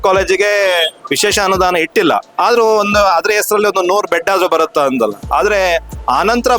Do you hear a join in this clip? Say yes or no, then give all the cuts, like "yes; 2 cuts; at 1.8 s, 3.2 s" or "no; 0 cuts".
yes; 2 cuts; at 1.0 s, 2.3 s